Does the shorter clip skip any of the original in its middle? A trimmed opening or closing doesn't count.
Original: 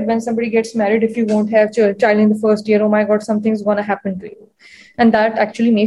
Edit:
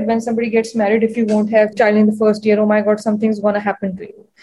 yes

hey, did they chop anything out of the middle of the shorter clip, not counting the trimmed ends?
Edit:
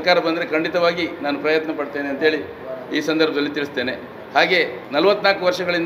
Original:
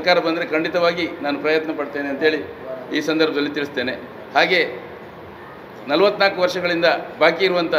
yes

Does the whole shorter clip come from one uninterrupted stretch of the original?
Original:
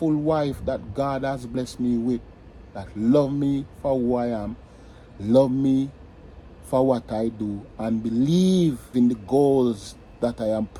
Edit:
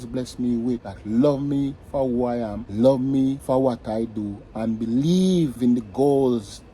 no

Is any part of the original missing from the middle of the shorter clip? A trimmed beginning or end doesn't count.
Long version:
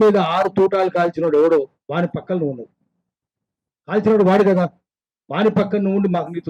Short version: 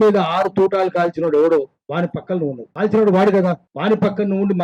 yes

